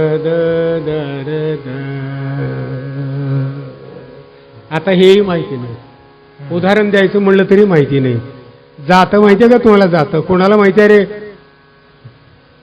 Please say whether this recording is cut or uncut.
uncut